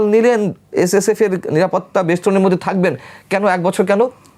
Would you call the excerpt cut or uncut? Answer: uncut